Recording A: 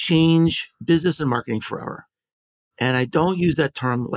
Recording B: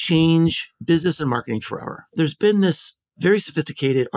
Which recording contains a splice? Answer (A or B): B